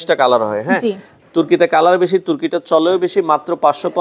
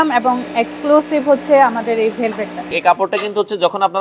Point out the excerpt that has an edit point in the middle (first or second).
second